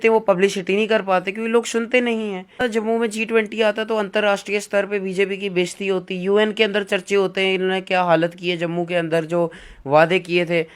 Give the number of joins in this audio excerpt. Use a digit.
1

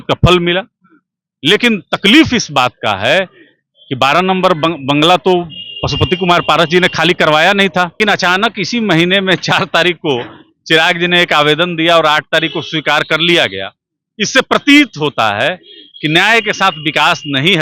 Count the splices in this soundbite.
1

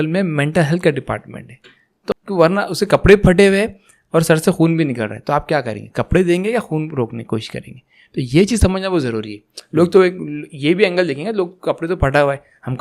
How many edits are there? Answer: 1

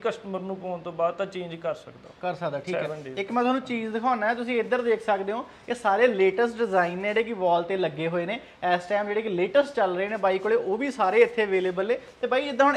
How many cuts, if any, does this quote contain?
0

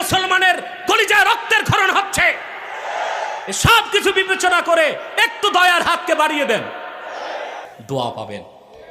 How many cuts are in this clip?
1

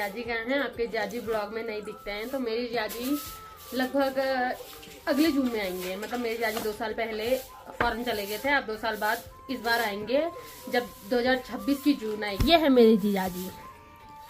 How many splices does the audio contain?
0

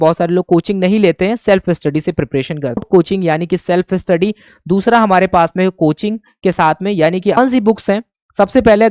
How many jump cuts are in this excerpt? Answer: 2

